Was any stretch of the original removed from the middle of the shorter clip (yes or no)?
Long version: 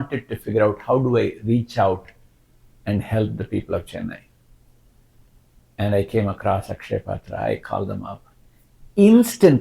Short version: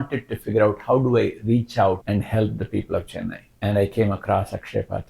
yes